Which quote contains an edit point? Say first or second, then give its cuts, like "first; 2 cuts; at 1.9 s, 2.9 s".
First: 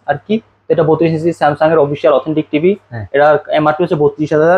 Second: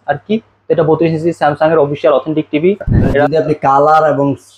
second; 1 cut; at 3.2 s